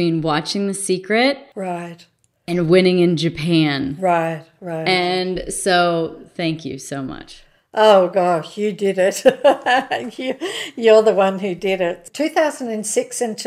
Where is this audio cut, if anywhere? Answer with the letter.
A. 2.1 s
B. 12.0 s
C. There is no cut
B